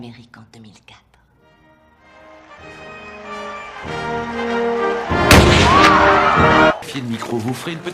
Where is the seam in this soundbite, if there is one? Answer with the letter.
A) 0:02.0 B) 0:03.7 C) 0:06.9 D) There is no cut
C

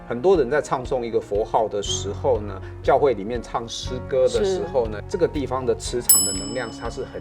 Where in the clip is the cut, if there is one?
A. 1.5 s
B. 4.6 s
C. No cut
C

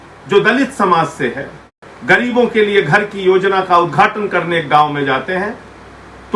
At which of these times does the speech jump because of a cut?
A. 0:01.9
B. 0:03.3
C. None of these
A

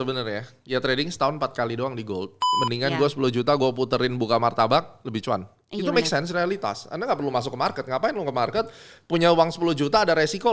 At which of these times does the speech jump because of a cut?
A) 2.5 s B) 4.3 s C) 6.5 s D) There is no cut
A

